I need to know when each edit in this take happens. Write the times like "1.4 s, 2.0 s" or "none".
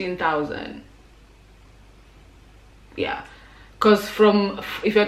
none